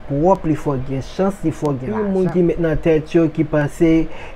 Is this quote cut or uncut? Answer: cut